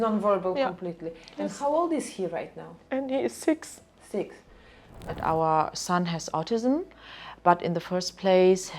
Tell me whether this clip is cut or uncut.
cut